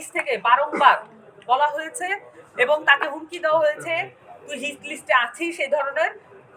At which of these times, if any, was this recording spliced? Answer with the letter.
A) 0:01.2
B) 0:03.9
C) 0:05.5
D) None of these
D